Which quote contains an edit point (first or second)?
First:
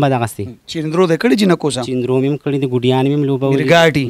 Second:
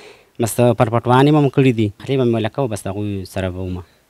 second